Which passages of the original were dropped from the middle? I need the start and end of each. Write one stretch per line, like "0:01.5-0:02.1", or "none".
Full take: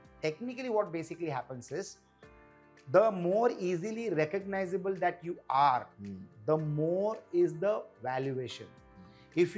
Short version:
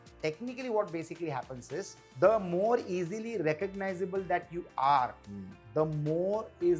0:02.0-0:02.7